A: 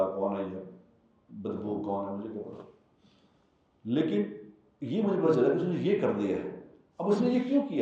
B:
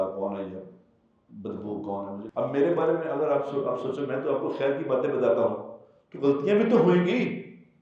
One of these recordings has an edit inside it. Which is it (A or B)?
B